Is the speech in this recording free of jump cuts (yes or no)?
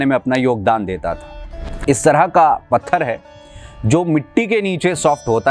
no